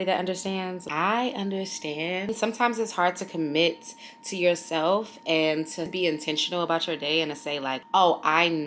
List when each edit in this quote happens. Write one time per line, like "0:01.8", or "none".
0:00.8
0:02.3
0:07.8